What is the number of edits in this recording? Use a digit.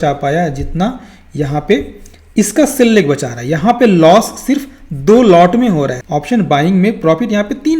1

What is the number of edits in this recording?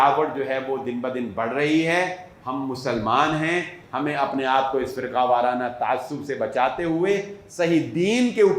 1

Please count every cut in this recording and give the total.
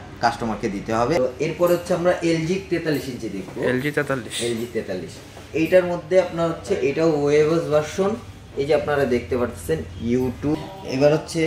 2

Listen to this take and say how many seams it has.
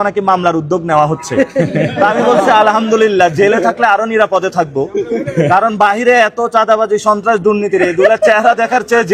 0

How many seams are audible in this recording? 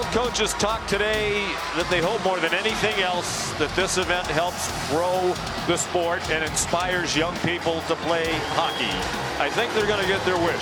0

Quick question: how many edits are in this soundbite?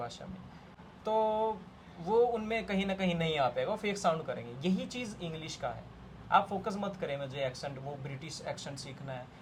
0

